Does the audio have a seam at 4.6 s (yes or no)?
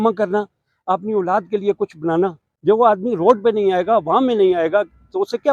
no